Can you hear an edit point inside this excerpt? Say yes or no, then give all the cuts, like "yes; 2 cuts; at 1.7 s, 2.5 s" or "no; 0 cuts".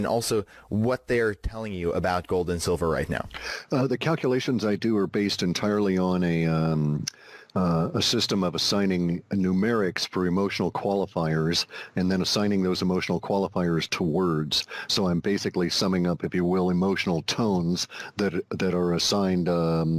no; 0 cuts